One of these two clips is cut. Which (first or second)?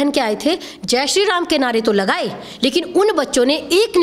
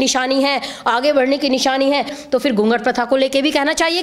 second